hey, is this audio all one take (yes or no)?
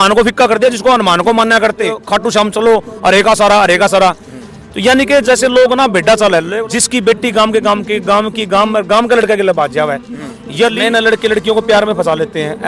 no